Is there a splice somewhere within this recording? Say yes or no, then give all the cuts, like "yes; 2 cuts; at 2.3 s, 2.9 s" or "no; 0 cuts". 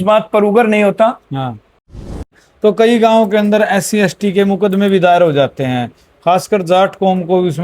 yes; 1 cut; at 2.0 s